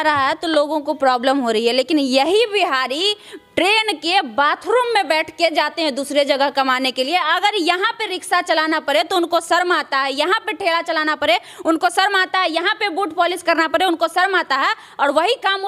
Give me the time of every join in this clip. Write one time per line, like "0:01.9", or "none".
none